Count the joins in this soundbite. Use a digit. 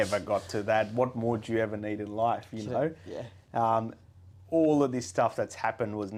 0